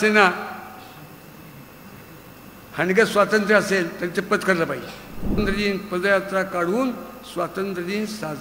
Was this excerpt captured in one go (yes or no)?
no